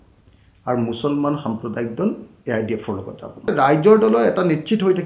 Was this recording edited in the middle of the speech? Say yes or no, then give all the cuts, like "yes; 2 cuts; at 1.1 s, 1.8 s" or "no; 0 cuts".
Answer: yes; 1 cut; at 3.5 s